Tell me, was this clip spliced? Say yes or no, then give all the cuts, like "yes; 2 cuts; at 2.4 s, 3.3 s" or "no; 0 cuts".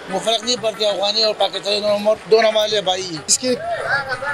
yes; 1 cut; at 3.3 s